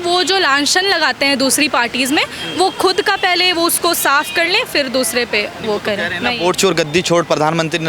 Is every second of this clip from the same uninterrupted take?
yes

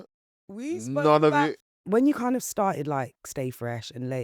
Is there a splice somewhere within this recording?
yes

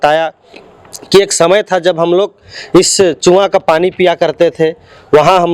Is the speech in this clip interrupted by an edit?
no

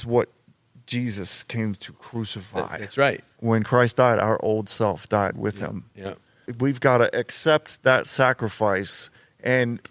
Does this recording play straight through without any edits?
no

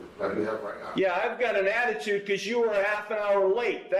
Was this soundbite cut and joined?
no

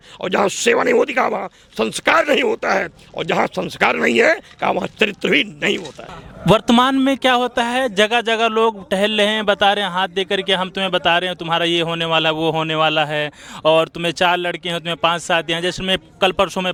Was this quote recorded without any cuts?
yes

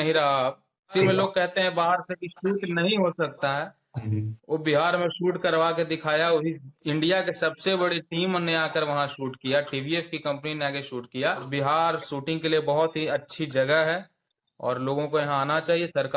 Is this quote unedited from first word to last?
no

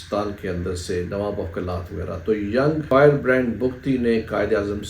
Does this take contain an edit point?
yes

